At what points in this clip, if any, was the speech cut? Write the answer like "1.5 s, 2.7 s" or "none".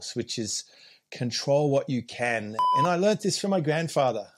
2.6 s